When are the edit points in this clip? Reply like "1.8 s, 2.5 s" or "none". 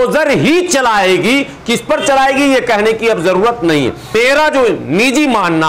4.1 s